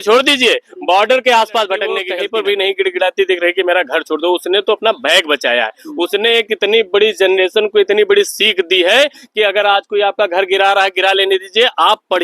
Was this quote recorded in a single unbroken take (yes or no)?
no